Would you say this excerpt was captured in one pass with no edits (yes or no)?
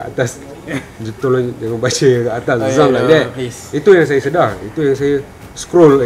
yes